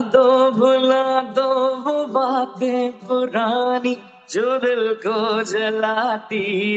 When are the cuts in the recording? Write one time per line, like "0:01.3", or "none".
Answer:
none